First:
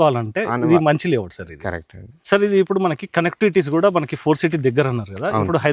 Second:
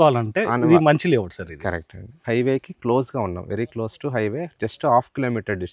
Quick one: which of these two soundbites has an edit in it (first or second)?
second